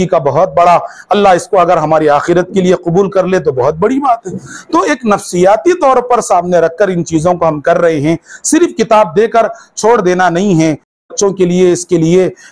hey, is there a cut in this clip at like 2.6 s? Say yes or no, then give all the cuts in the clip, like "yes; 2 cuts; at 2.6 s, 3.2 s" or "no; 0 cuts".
no; 1 cut; at 11.1 s